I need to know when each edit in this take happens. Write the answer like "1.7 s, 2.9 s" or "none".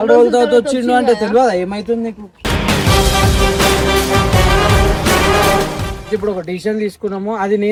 none